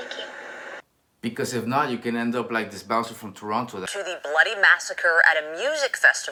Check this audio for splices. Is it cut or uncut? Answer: uncut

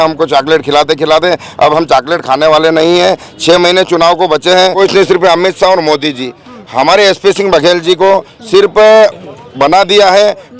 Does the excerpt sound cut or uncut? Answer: cut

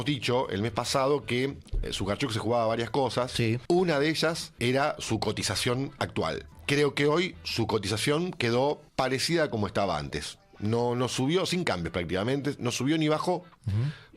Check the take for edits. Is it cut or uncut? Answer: cut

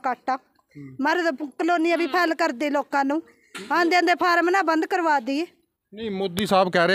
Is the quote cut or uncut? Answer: uncut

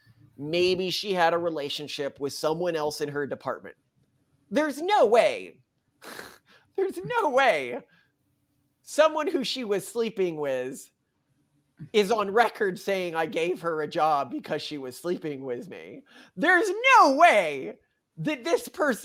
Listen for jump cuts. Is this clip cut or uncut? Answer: uncut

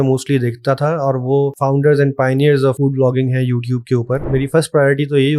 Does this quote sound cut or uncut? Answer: cut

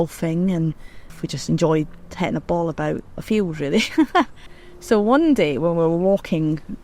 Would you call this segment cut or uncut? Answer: cut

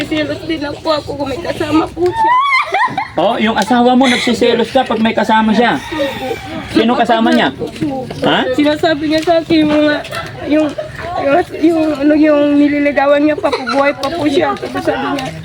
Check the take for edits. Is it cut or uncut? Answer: uncut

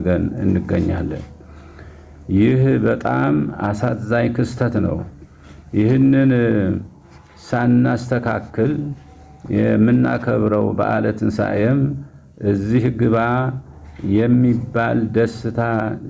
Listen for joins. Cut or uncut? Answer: uncut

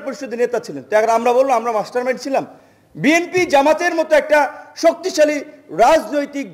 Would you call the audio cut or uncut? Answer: uncut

